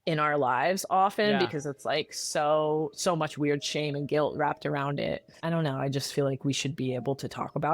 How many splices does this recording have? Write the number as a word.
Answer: one